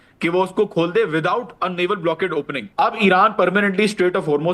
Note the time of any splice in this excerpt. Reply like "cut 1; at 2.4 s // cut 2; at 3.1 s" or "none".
cut 1; at 2.6 s